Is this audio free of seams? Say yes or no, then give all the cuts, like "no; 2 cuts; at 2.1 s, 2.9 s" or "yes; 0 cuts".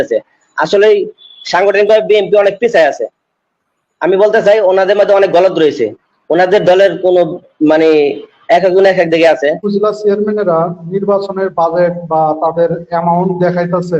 no; 1 cut; at 9.6 s